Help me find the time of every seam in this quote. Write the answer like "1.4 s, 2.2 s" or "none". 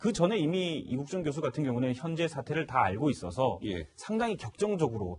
1.1 s